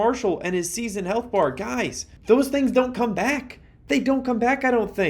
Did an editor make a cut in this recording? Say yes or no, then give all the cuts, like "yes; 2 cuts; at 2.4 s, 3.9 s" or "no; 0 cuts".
no; 0 cuts